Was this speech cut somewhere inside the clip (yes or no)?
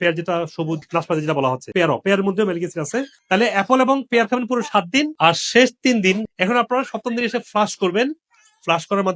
yes